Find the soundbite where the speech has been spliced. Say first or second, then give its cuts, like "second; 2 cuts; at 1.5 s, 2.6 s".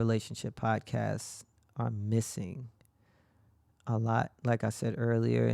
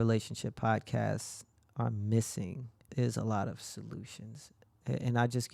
second; 1 cut; at 2.8 s